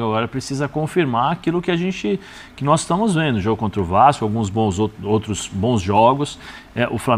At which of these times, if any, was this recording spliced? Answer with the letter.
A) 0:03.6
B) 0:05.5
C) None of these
C